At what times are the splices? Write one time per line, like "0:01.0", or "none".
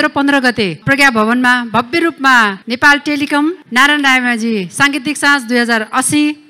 none